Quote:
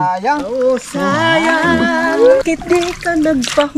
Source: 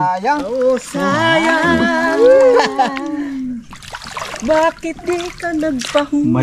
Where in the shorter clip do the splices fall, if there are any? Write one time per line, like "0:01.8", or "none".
0:02.4